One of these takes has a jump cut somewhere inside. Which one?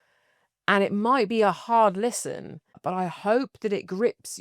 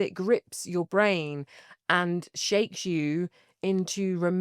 first; 1 cut; at 2.8 s

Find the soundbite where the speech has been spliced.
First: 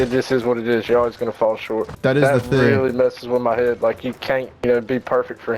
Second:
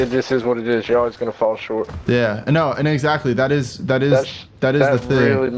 first; 1 cut; at 1.9 s

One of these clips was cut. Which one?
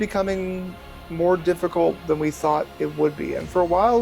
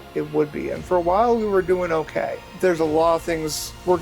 second; 1 cut; at 2.4 s

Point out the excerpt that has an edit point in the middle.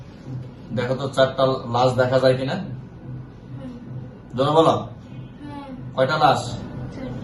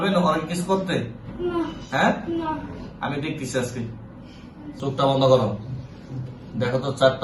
second; 1 cut; at 4.7 s

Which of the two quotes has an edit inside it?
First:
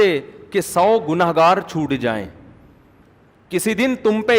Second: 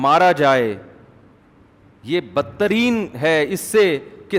first; 1 cut; at 3.0 s

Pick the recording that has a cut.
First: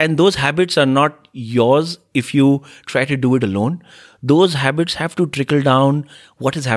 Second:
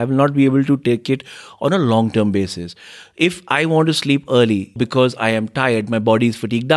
second; 1 cut; at 4.8 s

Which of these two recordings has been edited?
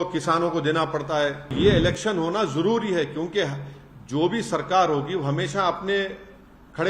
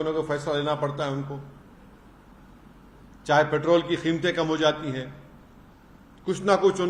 first; 1 cut; at 1.5 s

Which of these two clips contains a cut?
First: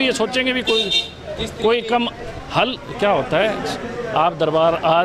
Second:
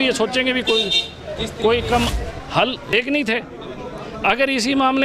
second; 1 cut; at 2.9 s

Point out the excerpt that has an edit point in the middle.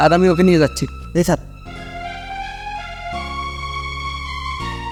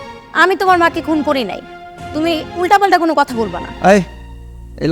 second; 1 cut; at 3.6 s

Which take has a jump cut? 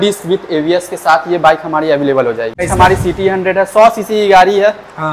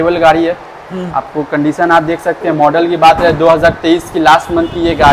first; 1 cut; at 2.7 s

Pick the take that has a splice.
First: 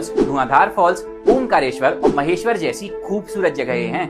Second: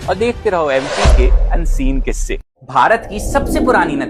second; 1 cut; at 2.4 s

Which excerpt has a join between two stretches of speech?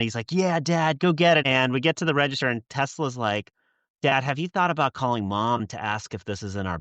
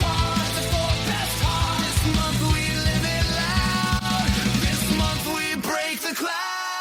first; 1 cut; at 1.4 s

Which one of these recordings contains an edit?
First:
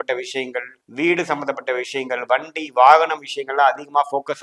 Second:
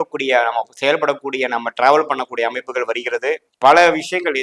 second; 1 cut; at 3.5 s

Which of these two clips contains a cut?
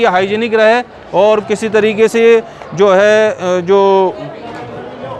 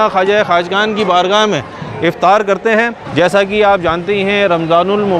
second; 1 cut; at 3.0 s

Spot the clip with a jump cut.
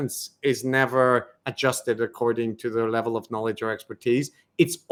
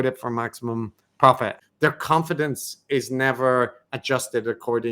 second; 1 cut; at 1.5 s

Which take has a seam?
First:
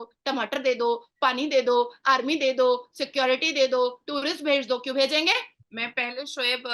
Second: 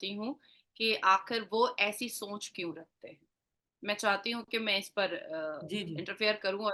first; 1 cut; at 5.6 s

